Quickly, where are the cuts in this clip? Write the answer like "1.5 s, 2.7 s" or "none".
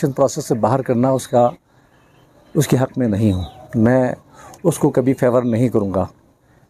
none

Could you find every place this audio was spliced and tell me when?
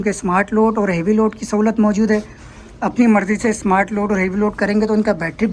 none

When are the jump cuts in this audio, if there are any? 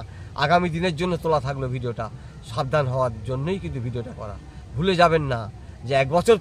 none

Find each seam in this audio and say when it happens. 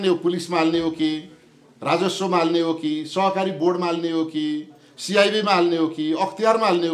none

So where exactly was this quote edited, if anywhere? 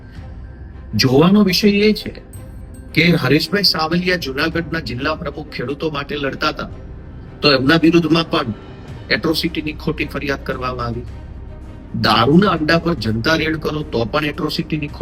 none

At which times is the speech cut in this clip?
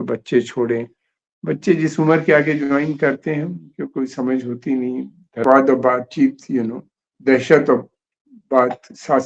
5.4 s

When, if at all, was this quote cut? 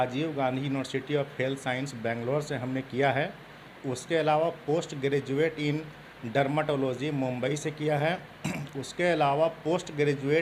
none

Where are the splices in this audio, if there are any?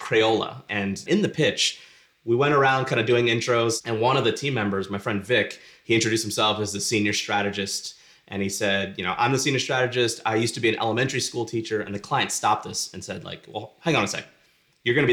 1.0 s, 3.8 s

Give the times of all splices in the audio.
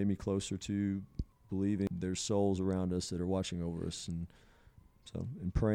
1.9 s

